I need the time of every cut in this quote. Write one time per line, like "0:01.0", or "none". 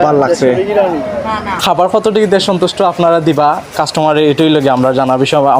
0:01.6